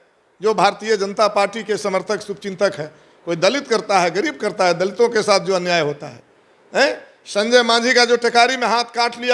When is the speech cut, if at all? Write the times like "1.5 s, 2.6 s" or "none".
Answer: none